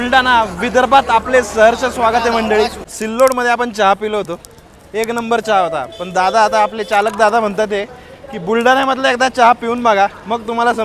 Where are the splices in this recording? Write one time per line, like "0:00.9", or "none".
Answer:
0:02.9